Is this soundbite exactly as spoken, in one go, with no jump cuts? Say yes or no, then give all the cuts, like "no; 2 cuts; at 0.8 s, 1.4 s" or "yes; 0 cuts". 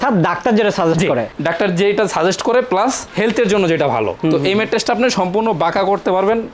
yes; 0 cuts